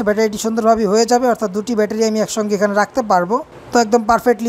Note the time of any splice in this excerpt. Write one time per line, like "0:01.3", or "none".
none